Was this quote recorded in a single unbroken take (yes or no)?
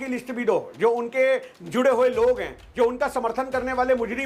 yes